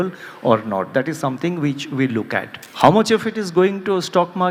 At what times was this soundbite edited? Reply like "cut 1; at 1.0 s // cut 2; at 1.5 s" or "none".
cut 1; at 2.6 s